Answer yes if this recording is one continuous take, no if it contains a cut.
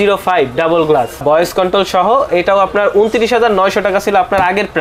no